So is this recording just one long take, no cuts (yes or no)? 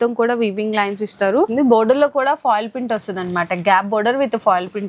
no